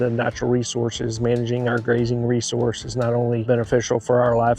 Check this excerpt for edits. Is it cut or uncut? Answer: cut